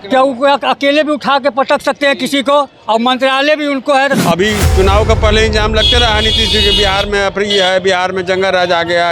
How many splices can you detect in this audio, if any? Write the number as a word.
one